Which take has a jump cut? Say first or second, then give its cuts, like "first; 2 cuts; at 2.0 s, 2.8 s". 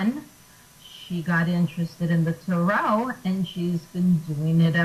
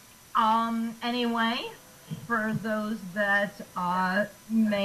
second; 1 cut; at 1.5 s